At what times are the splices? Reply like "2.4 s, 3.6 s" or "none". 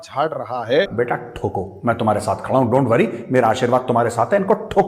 0.9 s